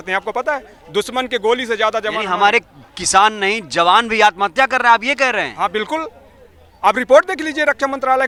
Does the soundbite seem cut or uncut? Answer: uncut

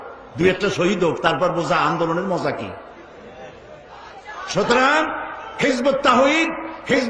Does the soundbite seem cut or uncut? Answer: cut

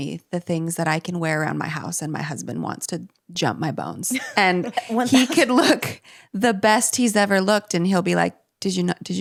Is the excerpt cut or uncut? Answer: uncut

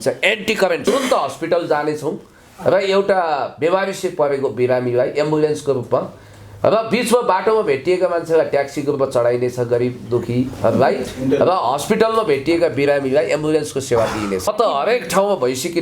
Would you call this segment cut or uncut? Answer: cut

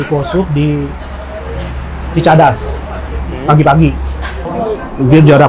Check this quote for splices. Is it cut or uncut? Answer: cut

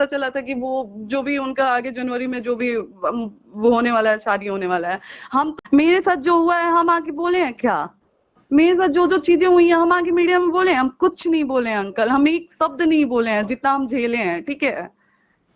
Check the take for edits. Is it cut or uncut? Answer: cut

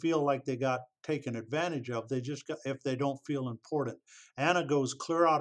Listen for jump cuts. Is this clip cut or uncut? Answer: uncut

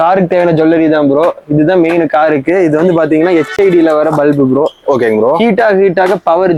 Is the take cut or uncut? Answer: uncut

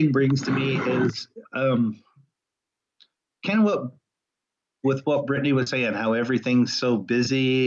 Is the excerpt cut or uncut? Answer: uncut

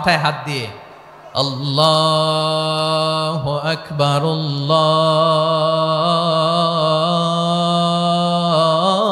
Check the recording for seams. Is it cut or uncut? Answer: uncut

